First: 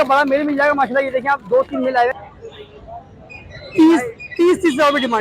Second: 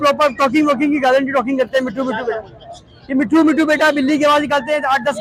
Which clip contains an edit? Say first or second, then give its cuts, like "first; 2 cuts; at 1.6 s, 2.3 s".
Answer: first; 1 cut; at 2.1 s